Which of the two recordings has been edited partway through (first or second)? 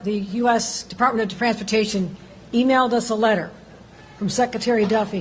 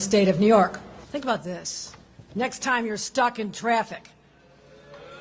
second